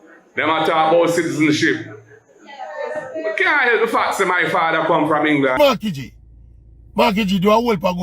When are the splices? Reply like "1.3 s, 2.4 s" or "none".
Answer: 5.6 s